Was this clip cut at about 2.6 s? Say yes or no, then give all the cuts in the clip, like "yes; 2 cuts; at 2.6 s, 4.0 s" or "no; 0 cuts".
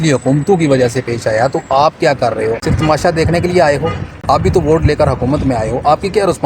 yes; 1 cut; at 2.6 s